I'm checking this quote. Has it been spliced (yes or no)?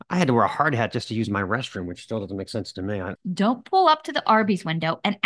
yes